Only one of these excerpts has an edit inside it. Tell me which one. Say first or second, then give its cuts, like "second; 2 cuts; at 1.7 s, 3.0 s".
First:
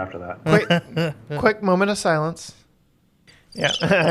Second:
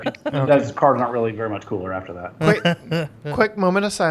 first; 1 cut; at 3.2 s